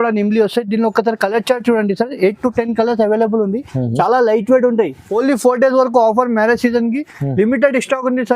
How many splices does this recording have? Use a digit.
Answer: 1